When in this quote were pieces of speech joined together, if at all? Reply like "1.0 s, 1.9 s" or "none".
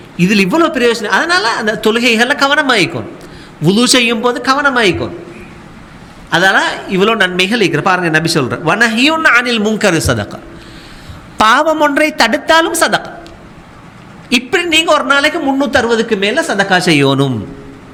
none